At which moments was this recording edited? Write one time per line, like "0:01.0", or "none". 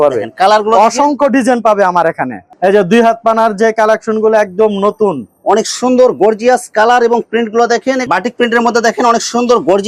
0:02.5
0:08.0